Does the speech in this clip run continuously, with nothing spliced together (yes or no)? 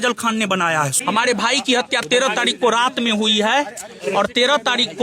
no